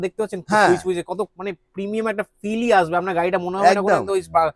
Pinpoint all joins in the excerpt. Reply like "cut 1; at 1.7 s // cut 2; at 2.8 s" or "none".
none

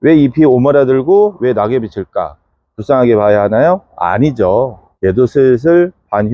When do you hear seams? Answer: none

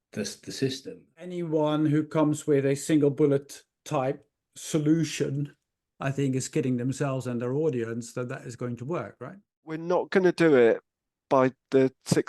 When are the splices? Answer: cut 1; at 1.3 s // cut 2; at 9.8 s

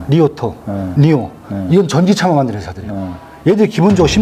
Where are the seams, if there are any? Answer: none

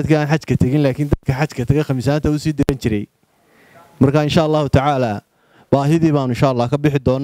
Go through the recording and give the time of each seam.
none

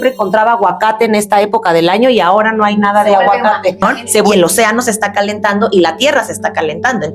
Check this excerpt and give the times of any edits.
cut 1; at 4.3 s

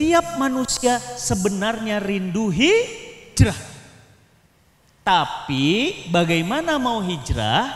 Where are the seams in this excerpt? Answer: none

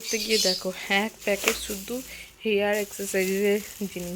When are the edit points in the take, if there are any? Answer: none

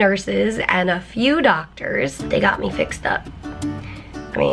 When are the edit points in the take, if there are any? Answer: cut 1; at 2.2 s

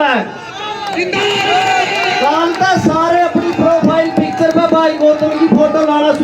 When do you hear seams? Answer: none

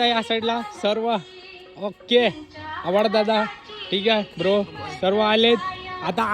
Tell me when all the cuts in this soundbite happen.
none

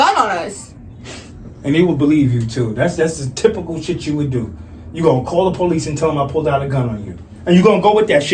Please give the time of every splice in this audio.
none

